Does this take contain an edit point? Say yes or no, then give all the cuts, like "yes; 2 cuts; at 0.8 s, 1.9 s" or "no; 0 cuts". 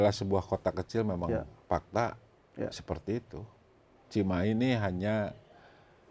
no; 0 cuts